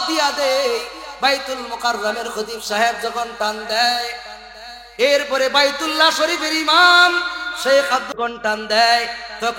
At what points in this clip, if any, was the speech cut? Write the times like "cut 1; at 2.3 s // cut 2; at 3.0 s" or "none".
cut 1; at 8.1 s